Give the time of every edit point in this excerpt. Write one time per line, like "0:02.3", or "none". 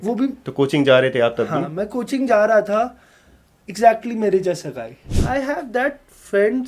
0:05.1

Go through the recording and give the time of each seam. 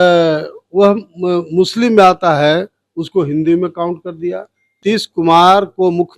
0:04.8

